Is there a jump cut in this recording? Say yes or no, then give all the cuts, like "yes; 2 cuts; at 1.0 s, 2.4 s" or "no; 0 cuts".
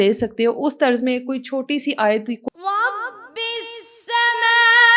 yes; 1 cut; at 2.4 s